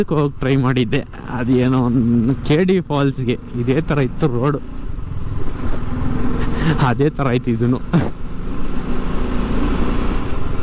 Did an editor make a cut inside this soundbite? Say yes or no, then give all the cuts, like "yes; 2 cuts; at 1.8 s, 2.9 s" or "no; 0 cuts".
no; 0 cuts